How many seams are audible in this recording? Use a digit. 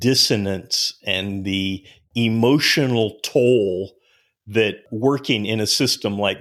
1